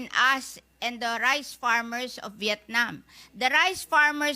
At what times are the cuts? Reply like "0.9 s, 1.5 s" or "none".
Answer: none